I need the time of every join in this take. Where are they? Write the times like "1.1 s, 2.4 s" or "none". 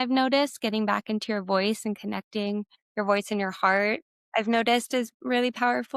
2.8 s, 4.1 s